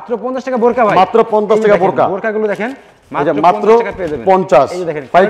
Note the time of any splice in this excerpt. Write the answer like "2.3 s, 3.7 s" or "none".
none